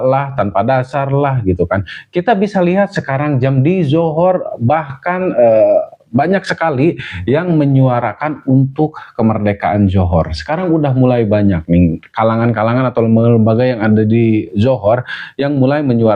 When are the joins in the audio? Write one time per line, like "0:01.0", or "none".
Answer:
none